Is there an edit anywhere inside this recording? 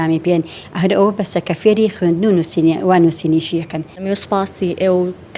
yes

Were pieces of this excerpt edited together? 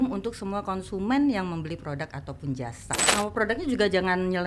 yes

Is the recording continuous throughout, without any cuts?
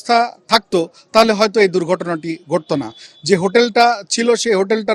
yes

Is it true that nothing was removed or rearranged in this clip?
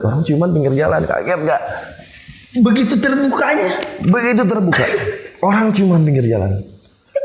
yes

